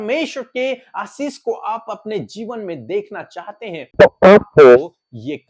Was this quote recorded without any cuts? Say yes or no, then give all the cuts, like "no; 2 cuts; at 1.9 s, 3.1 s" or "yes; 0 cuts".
no; 1 cut; at 3.9 s